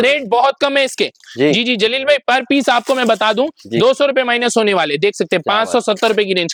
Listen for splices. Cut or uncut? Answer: uncut